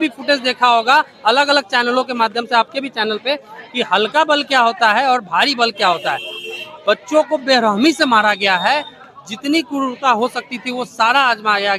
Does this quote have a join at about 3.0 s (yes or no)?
no